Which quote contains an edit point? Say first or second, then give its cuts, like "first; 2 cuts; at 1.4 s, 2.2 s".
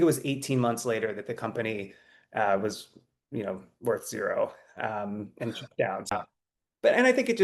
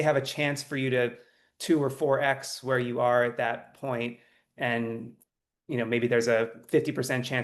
first; 1 cut; at 6.1 s